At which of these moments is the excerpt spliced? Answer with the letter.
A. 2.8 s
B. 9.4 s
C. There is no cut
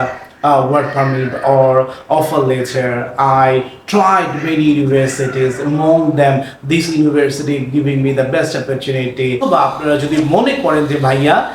B